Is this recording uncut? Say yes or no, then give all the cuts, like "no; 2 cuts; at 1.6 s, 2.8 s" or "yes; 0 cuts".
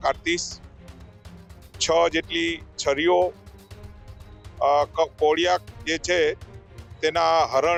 yes; 0 cuts